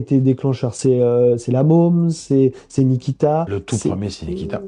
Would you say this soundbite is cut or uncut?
uncut